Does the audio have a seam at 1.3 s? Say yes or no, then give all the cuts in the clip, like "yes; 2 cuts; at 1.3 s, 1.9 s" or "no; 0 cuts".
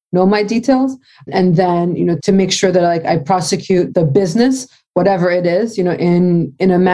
yes; 3 cuts; at 1.3 s, 2.2 s, 3.9 s